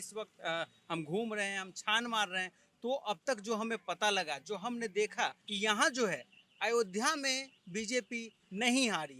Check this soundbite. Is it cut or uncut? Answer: cut